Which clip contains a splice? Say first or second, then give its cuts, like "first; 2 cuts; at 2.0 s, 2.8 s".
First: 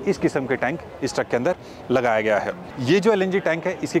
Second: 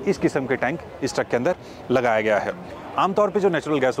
first; 1 cut; at 2.7 s